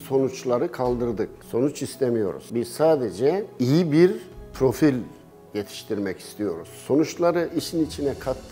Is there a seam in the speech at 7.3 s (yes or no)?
no